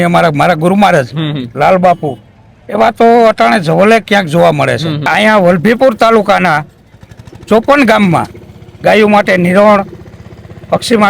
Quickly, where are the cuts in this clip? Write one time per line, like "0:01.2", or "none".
0:05.1

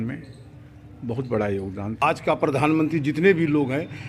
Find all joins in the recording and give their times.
0:02.0

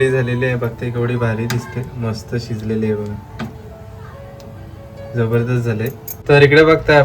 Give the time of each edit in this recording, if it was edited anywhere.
0:06.1

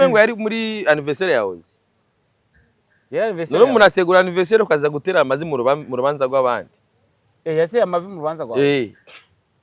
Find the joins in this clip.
none

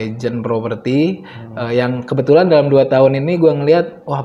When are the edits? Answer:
none

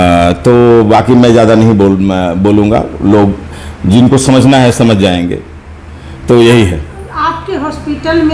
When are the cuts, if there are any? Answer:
none

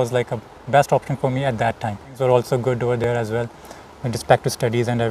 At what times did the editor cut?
0:02.1

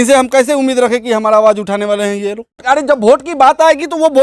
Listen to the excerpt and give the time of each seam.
0:02.6

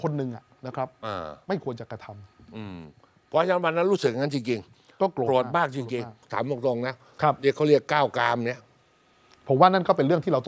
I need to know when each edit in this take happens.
0:06.3

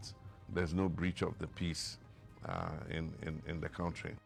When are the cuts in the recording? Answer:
none

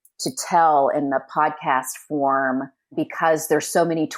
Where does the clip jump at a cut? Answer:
0:02.9

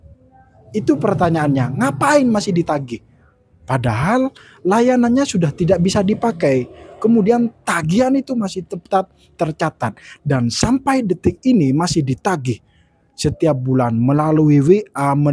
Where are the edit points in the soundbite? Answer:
none

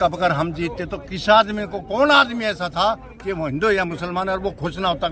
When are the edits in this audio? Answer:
none

